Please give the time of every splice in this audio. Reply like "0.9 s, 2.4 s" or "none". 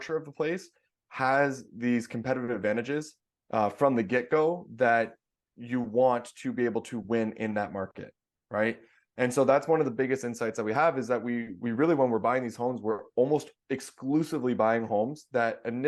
none